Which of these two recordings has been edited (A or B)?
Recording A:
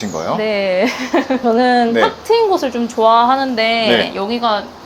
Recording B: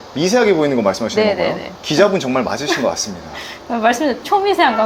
A